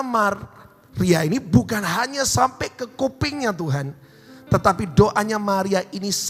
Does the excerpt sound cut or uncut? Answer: uncut